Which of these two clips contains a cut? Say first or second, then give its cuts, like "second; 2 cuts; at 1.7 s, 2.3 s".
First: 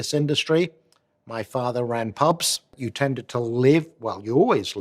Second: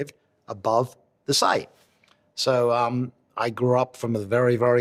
first; 1 cut; at 2.8 s